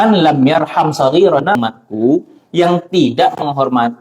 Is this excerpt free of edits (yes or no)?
no